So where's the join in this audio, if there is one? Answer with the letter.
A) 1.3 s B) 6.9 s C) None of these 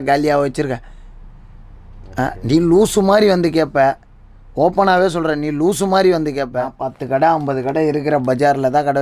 B